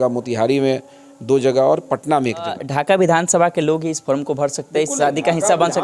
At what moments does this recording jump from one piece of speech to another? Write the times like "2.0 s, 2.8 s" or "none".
2.6 s